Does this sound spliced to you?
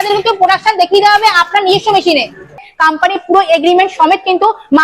yes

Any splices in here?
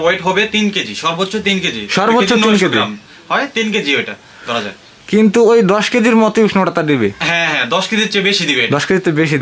no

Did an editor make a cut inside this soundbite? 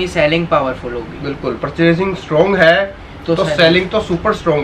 no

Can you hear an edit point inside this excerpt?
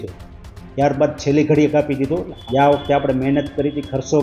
yes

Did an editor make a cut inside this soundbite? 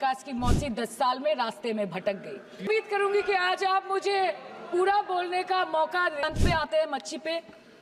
yes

